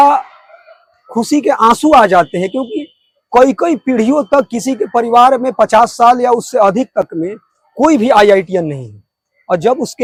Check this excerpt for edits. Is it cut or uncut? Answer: uncut